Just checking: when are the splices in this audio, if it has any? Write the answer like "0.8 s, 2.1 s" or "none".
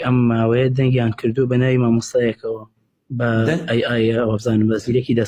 none